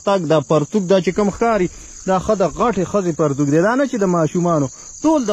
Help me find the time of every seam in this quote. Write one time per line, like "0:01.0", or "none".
none